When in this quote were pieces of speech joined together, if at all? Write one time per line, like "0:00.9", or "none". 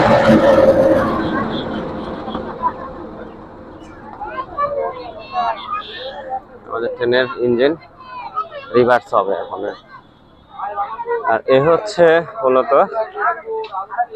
none